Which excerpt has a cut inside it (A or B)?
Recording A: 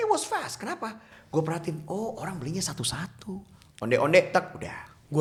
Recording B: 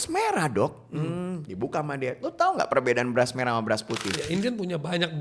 B